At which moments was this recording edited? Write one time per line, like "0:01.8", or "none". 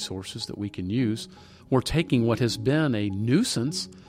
0:01.6